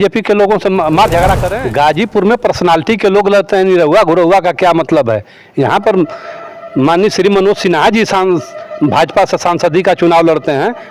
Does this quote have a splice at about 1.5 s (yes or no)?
yes